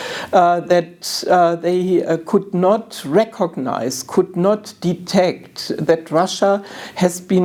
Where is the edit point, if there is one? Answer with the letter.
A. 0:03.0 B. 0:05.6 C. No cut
C